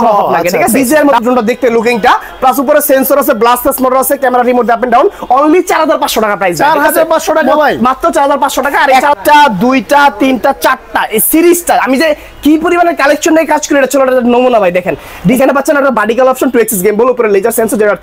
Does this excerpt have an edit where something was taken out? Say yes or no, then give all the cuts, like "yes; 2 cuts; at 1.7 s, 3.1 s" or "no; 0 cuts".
yes; 3 cuts; at 0.8 s, 9.0 s, 15.4 s